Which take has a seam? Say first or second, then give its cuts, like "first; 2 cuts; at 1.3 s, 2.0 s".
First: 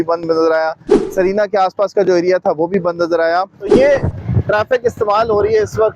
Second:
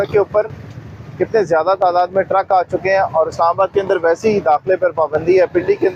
first; 2 cuts; at 0.9 s, 3.7 s